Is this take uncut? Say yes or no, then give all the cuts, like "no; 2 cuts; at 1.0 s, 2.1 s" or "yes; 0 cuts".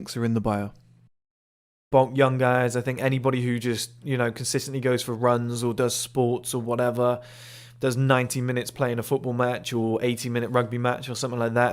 no; 1 cut; at 1.8 s